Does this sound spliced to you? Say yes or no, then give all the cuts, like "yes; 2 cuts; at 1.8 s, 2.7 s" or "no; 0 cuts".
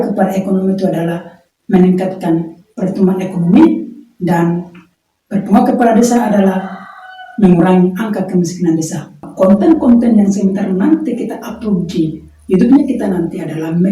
yes; 1 cut; at 9.2 s